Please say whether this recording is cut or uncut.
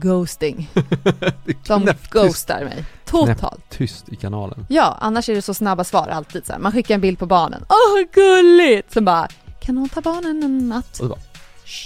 uncut